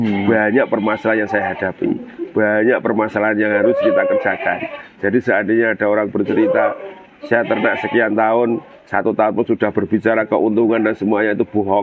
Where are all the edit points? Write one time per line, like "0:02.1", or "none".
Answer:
none